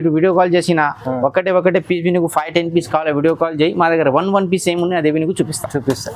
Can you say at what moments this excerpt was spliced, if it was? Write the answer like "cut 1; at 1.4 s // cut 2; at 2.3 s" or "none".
none